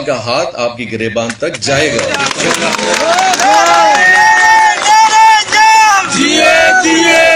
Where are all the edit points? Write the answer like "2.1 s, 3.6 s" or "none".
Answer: none